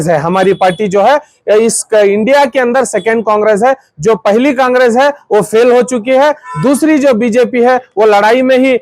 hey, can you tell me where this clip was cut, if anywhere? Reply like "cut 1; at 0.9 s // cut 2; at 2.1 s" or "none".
none

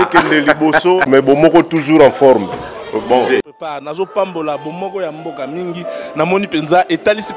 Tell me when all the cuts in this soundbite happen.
cut 1; at 3.5 s

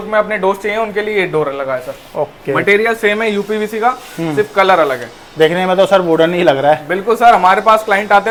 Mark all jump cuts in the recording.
none

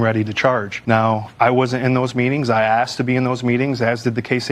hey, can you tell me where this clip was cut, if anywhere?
cut 1; at 1.3 s

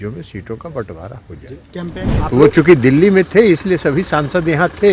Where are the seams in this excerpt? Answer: cut 1; at 2.0 s

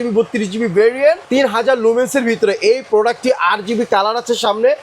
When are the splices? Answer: cut 1; at 1.2 s

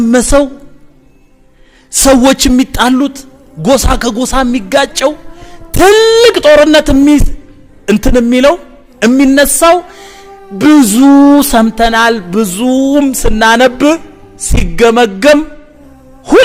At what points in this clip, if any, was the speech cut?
none

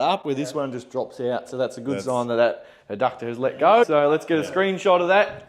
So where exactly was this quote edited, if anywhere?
cut 1; at 3.8 s

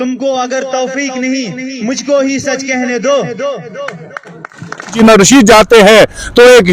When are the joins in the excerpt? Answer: cut 1; at 5.0 s

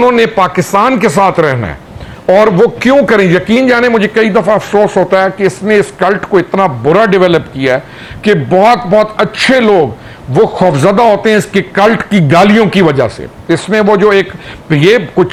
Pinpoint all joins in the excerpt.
none

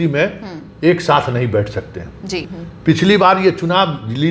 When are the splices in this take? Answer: cut 1; at 2.6 s

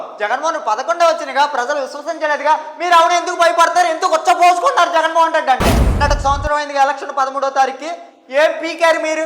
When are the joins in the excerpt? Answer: cut 1; at 5.9 s

